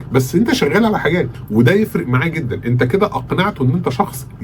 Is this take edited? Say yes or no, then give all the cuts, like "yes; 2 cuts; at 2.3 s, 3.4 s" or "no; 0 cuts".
yes; 1 cut; at 1.4 s